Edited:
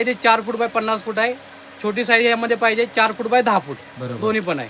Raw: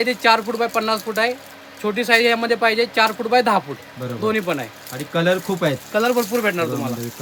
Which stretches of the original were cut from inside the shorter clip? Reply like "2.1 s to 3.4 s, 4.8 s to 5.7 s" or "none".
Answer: none